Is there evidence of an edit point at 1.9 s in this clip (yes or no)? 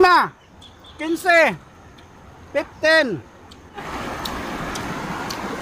no